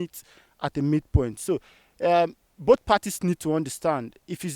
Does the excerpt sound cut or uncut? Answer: uncut